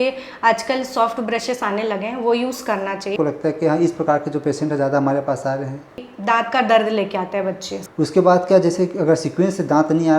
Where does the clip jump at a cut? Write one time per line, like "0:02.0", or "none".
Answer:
0:03.1
0:06.1
0:07.8